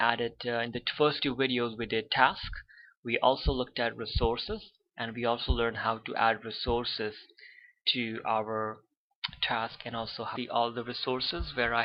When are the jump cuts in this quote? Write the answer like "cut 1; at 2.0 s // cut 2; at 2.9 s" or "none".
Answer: none